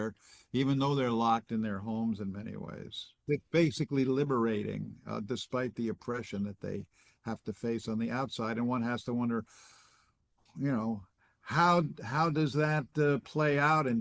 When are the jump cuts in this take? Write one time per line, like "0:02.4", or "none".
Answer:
0:03.2